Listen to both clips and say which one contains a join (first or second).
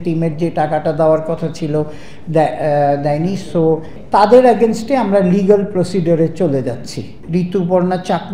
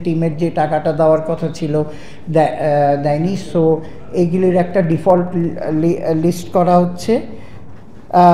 first